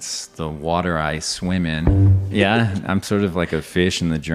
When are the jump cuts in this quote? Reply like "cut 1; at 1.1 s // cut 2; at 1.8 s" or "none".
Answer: cut 1; at 2.3 s